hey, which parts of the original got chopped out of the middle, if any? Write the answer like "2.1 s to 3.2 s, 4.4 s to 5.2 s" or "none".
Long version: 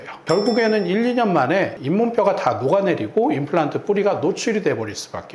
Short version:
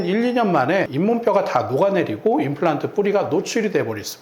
1.7 s to 1.8 s